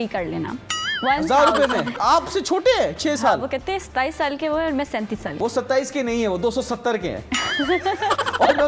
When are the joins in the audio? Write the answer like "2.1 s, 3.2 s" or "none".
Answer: 2.0 s, 5.4 s